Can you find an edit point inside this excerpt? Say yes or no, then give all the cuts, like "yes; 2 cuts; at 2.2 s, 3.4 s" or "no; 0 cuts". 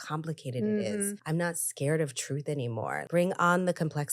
yes; 2 cuts; at 1.2 s, 3.0 s